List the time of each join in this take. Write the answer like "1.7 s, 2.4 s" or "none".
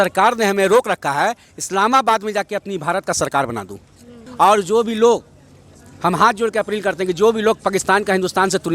4.2 s